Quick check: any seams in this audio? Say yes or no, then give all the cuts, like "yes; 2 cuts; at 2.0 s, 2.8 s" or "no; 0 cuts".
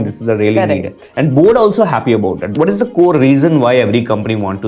yes; 1 cut; at 2.4 s